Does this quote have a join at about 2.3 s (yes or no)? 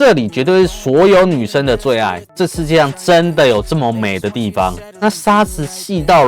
yes